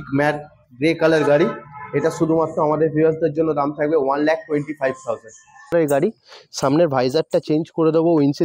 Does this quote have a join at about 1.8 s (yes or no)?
no